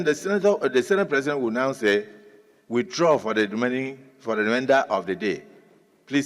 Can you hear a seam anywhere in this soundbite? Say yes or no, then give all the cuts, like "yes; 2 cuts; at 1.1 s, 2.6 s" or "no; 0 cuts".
no; 0 cuts